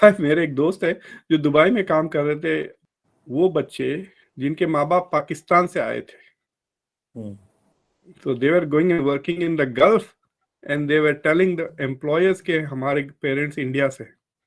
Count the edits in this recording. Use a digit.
1